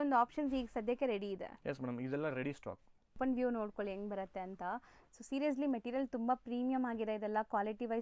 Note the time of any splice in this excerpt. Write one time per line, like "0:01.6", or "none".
0:03.2

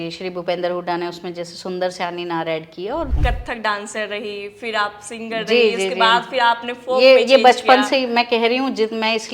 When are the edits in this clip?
0:03.1

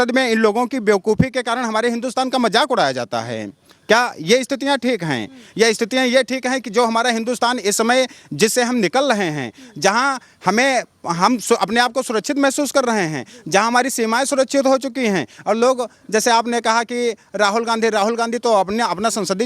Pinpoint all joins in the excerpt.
none

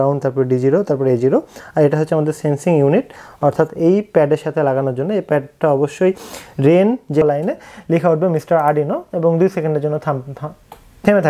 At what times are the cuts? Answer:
0:07.2

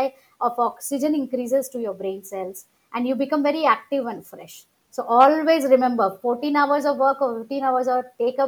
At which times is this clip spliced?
none

